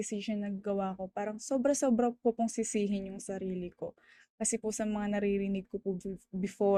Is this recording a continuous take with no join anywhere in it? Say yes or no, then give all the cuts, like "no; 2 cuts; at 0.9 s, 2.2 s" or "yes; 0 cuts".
yes; 0 cuts